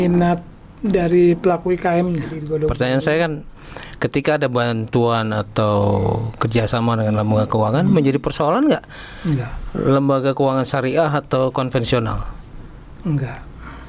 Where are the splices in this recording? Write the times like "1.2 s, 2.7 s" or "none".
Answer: 2.4 s